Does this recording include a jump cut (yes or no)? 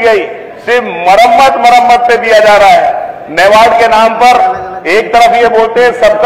no